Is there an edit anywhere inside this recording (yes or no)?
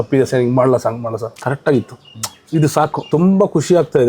yes